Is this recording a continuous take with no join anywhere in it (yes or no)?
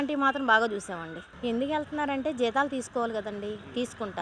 no